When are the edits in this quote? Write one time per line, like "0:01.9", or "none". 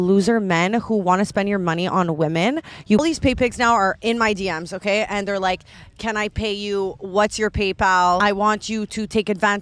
0:03.0
0:05.8
0:08.2